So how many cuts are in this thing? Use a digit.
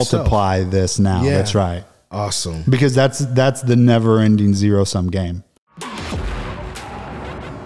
1